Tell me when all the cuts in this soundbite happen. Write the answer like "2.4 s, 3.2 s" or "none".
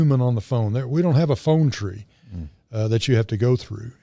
none